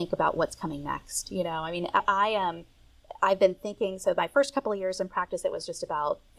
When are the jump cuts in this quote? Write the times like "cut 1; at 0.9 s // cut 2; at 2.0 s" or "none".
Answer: none